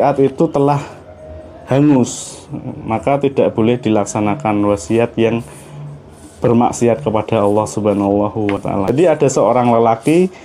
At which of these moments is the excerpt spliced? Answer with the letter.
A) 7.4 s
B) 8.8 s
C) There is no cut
B